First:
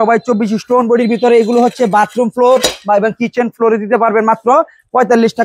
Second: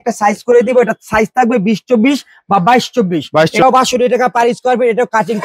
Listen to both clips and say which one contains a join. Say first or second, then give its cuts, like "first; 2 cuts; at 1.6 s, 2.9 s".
second; 1 cut; at 3.6 s